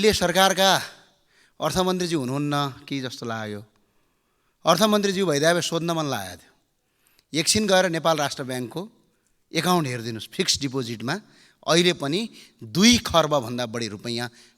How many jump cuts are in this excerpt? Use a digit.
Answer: 0